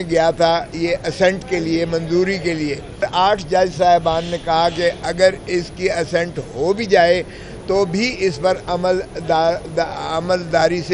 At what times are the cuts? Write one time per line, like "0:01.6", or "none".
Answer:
0:03.0

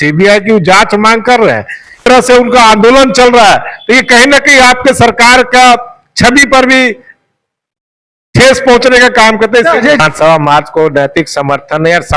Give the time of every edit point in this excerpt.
0:02.0
0:10.0

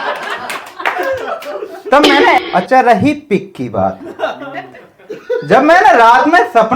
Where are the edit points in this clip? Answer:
0:02.4

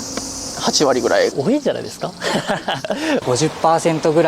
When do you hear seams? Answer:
0:01.3
0:03.2

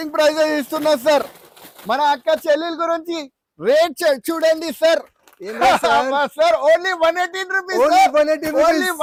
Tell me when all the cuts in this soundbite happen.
none

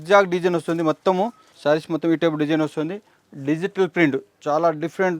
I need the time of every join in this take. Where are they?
0:01.5

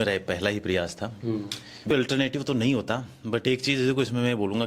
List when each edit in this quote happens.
0:01.9

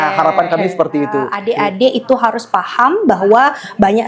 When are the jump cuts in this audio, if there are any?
0:01.4

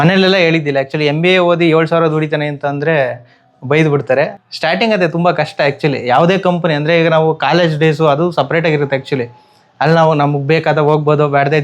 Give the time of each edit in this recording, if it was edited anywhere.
0:04.3

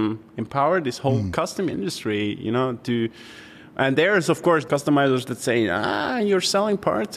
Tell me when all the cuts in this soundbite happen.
0:04.6

